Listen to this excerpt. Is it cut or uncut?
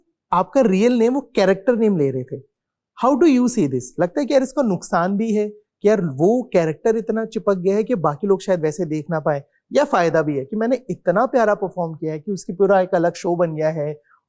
uncut